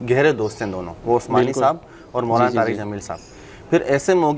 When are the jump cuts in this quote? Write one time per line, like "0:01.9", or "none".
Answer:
none